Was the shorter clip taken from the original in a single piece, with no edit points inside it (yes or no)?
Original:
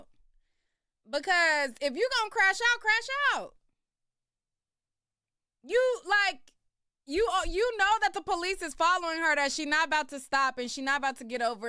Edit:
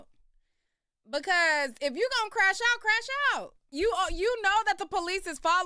no